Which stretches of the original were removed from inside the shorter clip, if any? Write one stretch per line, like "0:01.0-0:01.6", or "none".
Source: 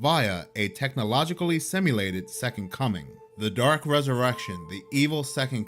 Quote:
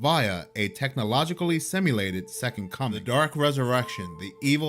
0:03.0-0:03.5